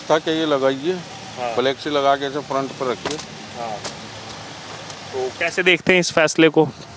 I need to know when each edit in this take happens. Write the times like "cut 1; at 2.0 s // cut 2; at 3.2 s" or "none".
none